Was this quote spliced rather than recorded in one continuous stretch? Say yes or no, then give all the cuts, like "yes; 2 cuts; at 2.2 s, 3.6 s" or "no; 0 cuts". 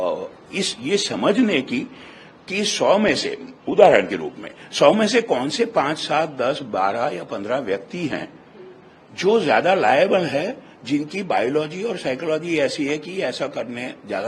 no; 0 cuts